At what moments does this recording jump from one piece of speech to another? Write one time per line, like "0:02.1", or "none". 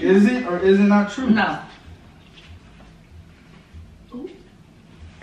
none